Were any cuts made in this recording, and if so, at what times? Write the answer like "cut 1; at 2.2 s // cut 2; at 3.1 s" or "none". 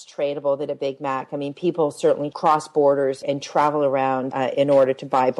cut 1; at 2.3 s // cut 2; at 3.2 s // cut 3; at 4.3 s